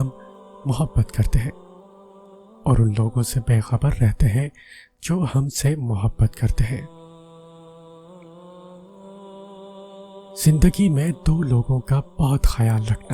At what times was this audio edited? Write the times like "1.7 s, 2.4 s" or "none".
7.0 s, 10.2 s